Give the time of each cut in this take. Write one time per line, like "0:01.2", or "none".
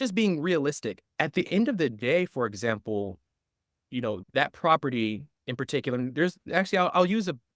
0:01.1